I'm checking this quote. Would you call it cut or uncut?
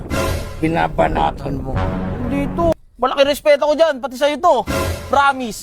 cut